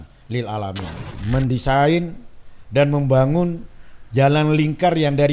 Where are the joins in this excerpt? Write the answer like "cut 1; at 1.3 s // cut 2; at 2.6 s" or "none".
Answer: cut 1; at 1.1 s